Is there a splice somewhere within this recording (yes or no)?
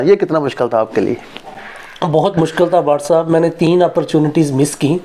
no